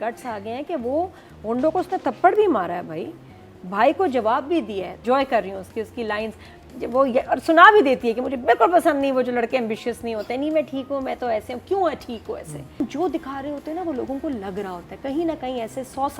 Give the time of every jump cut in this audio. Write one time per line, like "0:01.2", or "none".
0:05.0
0:12.8